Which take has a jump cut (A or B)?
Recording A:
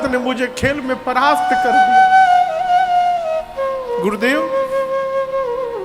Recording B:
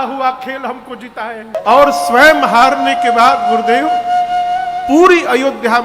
B